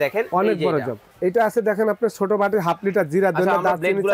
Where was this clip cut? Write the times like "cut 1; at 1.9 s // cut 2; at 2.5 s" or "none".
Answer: cut 1; at 1.0 s